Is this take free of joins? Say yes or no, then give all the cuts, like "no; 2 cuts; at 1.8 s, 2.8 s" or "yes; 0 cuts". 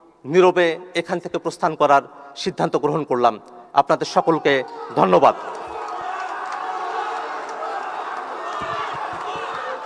yes; 0 cuts